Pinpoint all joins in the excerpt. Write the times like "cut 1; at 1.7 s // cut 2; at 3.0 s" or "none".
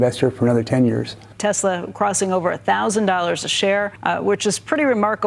cut 1; at 1.2 s // cut 2; at 3.9 s